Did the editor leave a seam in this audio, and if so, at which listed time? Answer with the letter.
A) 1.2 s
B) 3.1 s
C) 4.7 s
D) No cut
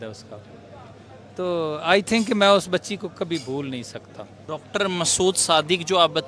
D